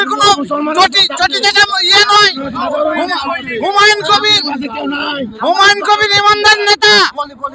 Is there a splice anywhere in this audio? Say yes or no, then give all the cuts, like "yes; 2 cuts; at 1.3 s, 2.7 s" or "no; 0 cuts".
no; 0 cuts